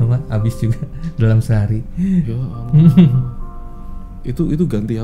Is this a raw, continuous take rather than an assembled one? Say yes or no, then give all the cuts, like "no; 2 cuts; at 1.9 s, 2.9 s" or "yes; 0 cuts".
yes; 0 cuts